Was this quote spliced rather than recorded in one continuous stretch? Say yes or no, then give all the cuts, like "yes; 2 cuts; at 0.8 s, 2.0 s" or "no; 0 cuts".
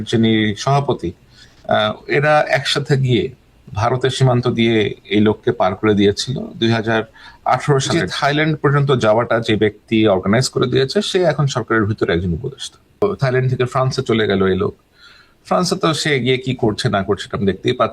yes; 2 cuts; at 8.0 s, 13.0 s